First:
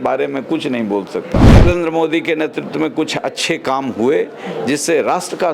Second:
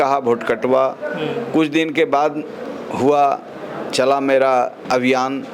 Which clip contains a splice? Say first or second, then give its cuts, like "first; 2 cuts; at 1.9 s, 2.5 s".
first; 1 cut; at 1.4 s